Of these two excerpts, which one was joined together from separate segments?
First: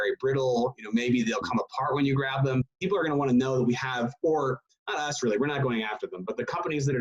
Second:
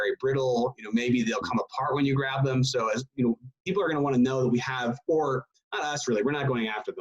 first; 1 cut; at 2.7 s

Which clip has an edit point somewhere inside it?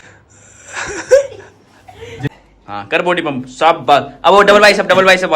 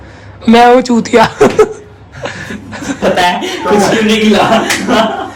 first; 1 cut; at 2.3 s

